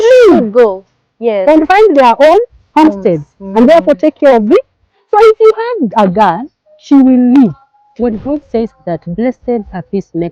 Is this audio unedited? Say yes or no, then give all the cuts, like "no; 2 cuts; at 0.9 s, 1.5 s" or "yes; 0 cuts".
no; 1 cut; at 7.8 s